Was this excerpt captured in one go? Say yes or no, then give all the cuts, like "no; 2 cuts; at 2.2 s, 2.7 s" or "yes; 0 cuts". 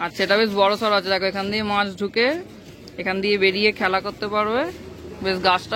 yes; 0 cuts